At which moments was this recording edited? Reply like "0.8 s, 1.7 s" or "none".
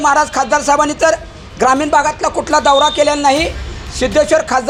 none

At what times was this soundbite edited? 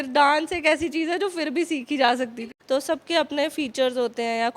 2.5 s

